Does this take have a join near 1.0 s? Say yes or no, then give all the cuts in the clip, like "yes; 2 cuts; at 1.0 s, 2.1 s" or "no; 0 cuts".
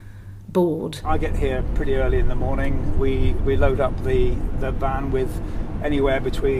yes; 1 cut; at 1.0 s